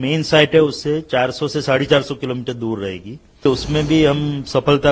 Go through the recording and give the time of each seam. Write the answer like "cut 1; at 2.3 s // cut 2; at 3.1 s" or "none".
cut 1; at 3.5 s